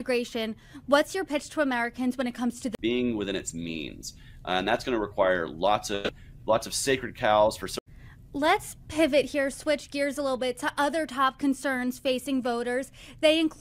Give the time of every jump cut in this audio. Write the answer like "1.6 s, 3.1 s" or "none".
2.8 s, 7.8 s, 12.8 s